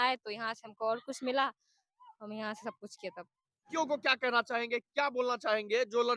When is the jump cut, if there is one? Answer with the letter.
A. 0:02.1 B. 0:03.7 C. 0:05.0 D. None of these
B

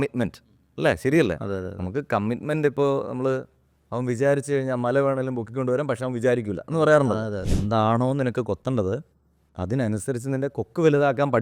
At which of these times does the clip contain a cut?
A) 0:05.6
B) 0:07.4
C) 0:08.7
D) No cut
B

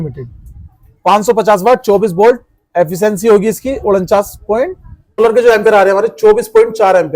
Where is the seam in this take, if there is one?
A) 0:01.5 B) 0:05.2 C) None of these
B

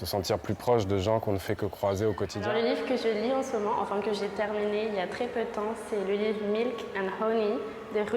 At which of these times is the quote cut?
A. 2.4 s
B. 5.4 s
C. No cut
A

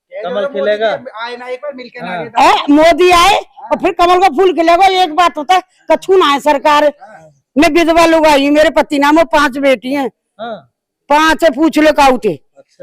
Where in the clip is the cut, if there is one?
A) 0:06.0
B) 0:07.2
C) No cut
C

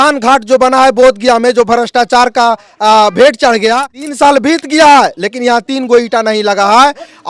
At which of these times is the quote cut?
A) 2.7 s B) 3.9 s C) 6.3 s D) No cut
B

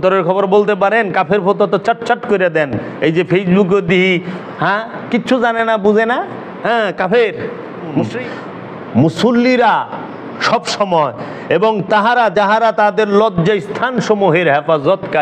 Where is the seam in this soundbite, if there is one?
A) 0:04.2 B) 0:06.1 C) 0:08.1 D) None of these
C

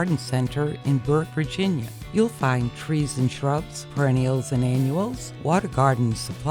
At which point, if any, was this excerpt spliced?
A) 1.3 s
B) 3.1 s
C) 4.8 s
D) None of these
A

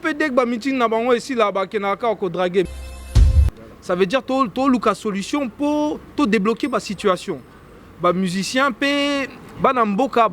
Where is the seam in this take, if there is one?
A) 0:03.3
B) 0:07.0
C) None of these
A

